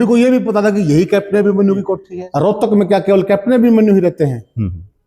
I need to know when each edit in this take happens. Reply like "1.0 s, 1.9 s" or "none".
2.2 s